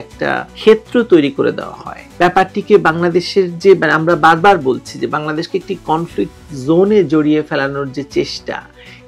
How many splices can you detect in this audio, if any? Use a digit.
0